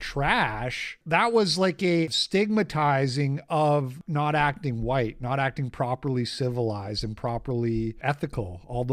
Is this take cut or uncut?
cut